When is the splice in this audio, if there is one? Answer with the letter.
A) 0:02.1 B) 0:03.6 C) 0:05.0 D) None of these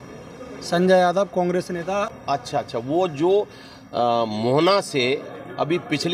A